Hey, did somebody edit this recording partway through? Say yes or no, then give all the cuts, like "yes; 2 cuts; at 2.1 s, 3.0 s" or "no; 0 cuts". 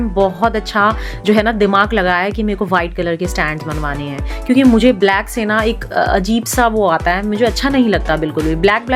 no; 0 cuts